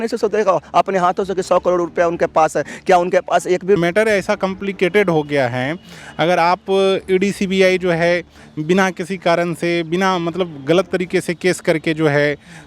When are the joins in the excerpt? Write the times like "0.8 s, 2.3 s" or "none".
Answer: 3.8 s